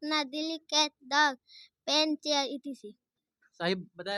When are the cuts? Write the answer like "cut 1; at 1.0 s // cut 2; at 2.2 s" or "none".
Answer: none